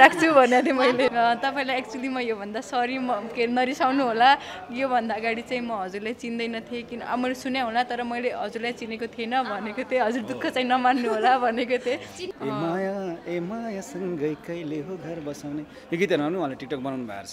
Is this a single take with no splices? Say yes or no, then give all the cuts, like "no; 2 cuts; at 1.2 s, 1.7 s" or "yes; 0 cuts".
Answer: no; 2 cuts; at 1.1 s, 12.3 s